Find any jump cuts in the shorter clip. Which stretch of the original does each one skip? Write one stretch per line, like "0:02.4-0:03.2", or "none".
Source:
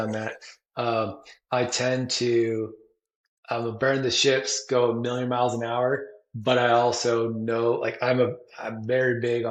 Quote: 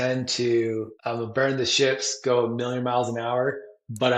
0:02.8-0:03.4